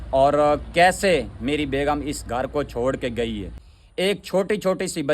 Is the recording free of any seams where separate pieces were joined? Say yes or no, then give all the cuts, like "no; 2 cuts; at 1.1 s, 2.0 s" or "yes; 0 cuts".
no; 1 cut; at 3.5 s